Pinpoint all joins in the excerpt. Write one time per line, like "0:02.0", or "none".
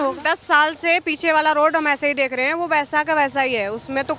none